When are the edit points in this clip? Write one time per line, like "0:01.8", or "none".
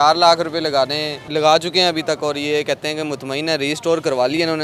0:01.2